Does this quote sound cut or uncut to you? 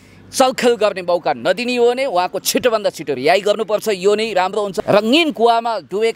cut